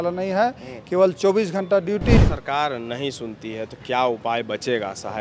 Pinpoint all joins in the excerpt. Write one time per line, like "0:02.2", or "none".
0:02.2